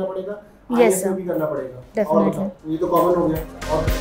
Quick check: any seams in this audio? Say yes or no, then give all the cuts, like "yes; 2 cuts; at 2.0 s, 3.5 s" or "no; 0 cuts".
yes; 1 cut; at 2.6 s